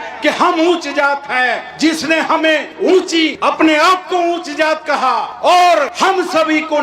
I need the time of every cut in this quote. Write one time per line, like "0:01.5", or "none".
0:03.4
0:05.9